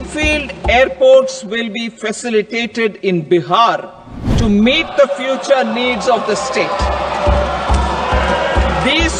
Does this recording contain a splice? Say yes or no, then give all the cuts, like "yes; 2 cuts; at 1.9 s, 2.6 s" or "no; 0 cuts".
no; 0 cuts